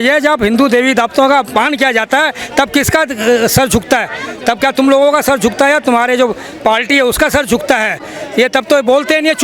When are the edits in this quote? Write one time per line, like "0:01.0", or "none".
none